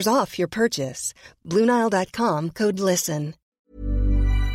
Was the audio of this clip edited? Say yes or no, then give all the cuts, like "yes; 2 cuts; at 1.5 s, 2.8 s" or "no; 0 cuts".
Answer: yes; 1 cut; at 3.4 s